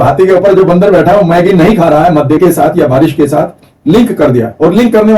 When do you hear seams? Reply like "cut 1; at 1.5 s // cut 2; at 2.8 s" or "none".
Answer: cut 1; at 2.4 s